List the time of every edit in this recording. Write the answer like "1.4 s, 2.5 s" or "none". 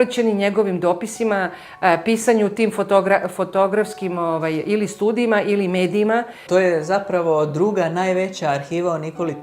6.4 s